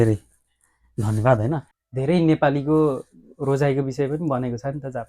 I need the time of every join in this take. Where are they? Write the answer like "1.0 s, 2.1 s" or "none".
1.8 s